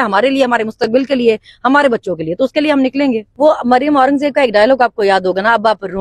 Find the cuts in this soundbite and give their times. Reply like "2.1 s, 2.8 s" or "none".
3.3 s